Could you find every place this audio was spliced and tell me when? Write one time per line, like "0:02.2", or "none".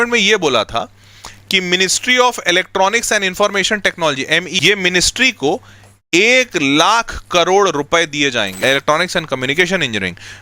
0:04.5
0:08.6